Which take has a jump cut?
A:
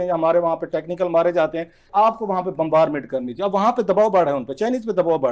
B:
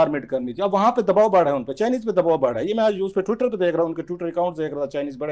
A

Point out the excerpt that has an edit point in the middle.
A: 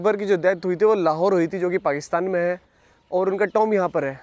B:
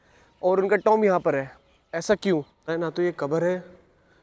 B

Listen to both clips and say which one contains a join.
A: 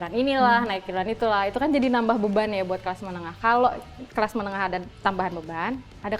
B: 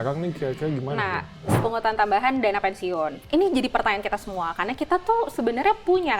B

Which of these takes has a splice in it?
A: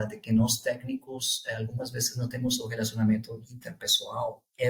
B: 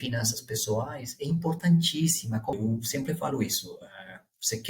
B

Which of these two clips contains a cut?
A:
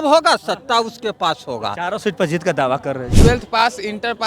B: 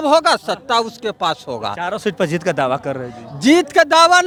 A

